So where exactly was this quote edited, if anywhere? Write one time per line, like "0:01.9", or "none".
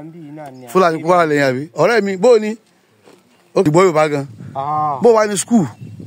0:03.6